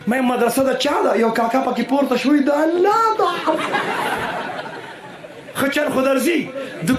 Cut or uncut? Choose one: uncut